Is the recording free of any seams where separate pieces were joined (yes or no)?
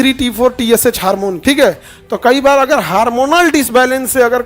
no